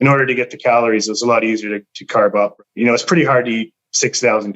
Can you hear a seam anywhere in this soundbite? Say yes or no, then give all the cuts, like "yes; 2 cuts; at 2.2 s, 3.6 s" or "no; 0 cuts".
yes; 1 cut; at 2.5 s